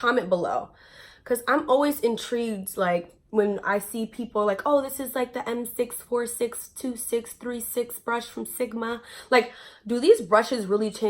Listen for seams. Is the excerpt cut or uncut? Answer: uncut